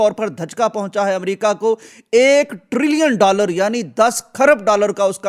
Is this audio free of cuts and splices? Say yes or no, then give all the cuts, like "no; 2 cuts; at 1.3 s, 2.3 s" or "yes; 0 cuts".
yes; 0 cuts